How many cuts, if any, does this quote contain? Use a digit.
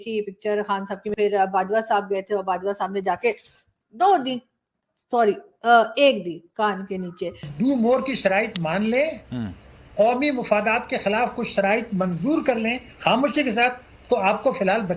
2